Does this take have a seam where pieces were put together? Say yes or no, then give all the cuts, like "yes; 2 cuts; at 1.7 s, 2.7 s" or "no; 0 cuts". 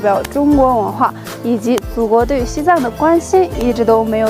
no; 0 cuts